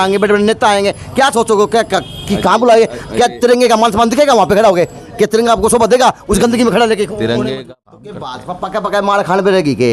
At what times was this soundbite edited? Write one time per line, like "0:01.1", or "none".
0:07.5